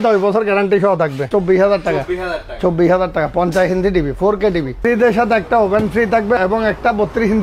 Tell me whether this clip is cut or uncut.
cut